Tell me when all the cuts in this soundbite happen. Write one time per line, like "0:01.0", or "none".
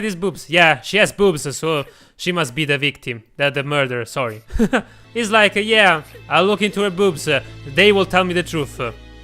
0:05.0